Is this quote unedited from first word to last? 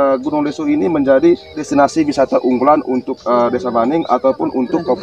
no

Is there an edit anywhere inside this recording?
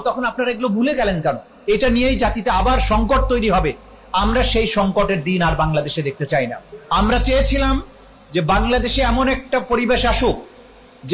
yes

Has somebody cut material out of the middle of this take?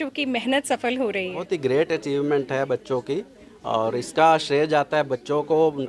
yes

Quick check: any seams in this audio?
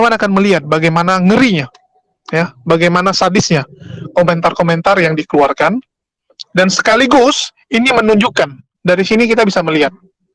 yes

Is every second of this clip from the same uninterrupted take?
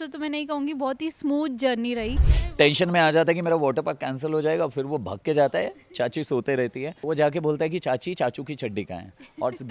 no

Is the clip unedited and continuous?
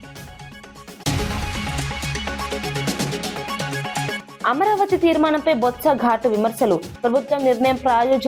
no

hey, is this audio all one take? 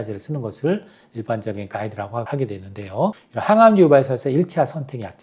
no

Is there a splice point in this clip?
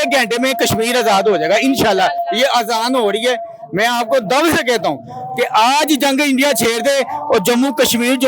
no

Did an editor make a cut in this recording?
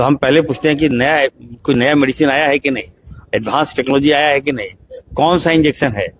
no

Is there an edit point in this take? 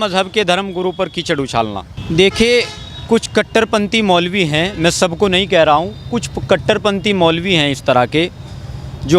yes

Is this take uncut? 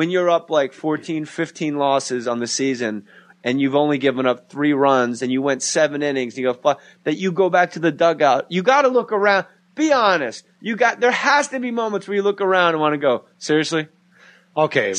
yes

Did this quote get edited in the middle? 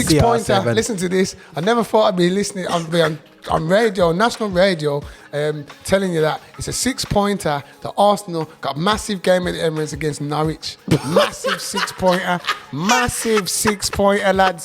no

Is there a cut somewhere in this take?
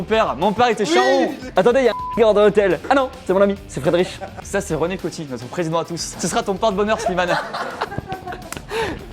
yes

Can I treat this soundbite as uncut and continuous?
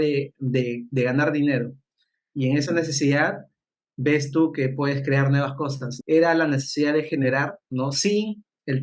no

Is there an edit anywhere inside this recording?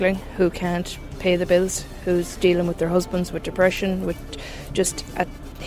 no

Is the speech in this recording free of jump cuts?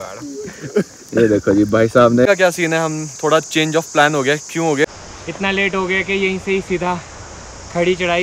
no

